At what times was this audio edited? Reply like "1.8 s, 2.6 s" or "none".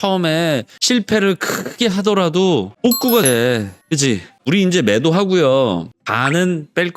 4.5 s